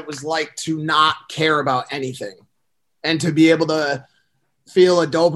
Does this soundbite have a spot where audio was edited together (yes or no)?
no